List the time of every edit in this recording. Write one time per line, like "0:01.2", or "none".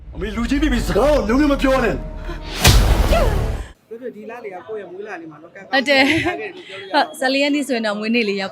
0:03.7